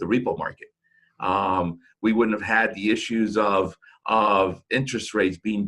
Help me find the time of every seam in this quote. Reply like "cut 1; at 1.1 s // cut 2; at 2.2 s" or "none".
none